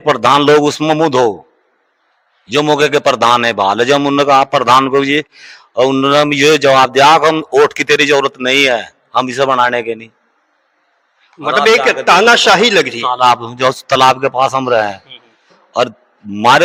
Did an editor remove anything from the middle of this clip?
no; 0 cuts

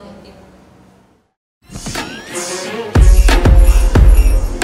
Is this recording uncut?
no; 1 cut; at 1.4 s

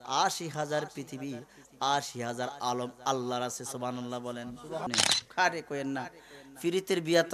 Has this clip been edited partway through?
yes; 1 cut; at 4.9 s

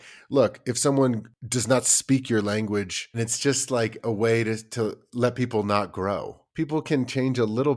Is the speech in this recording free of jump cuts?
no; 3 cuts; at 1.3 s, 3.2 s, 6.5 s

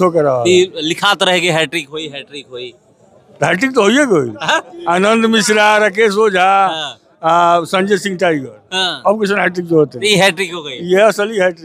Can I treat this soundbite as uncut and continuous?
yes; 0 cuts

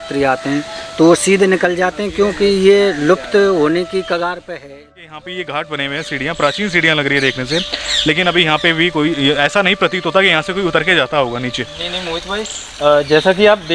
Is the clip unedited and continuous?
no; 1 cut; at 4.6 s

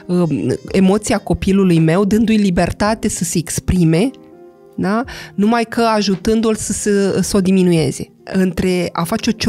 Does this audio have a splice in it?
yes; 1 cut; at 8.1 s

